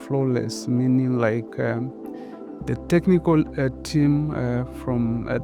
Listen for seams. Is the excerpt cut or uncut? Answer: uncut